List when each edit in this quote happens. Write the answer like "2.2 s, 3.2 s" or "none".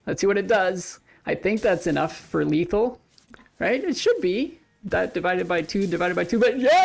none